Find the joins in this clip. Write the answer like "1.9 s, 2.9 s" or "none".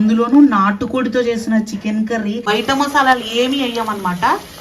2.4 s